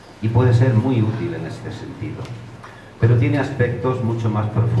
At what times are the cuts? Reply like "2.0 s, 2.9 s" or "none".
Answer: 3.0 s